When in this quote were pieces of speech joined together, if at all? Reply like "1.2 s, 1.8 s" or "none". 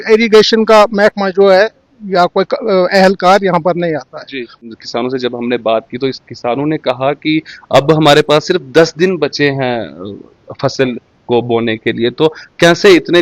4.6 s